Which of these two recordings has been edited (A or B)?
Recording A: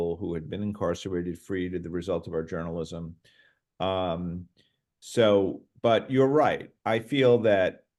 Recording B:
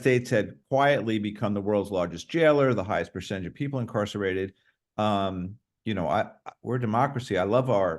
B